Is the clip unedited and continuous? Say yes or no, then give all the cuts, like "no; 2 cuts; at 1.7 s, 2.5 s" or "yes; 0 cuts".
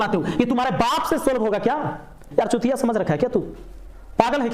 no; 1 cut; at 2.2 s